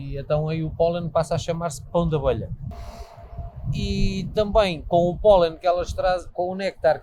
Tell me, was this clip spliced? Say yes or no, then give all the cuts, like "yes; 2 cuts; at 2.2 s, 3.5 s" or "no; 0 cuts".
no; 0 cuts